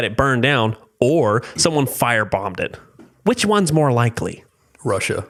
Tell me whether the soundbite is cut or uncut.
uncut